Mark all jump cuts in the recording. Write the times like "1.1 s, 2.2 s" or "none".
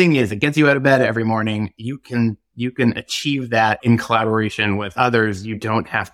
3.8 s, 4.9 s